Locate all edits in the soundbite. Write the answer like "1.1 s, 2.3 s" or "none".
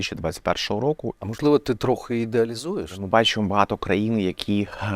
1.1 s, 3.0 s